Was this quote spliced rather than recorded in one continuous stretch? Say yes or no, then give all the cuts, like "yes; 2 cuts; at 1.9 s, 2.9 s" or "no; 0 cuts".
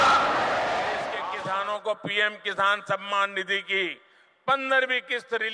yes; 1 cut; at 1.3 s